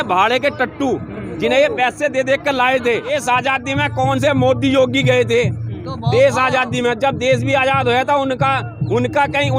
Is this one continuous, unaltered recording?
no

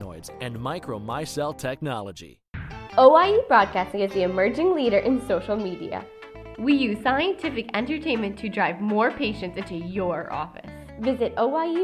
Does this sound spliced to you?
yes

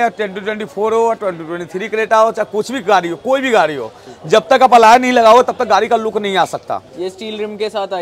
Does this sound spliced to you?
no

